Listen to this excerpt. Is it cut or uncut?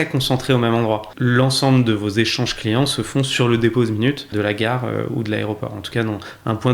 cut